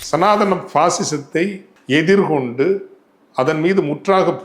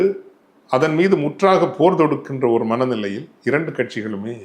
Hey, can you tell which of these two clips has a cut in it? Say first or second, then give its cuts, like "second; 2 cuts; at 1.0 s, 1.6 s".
first; 1 cut; at 1.7 s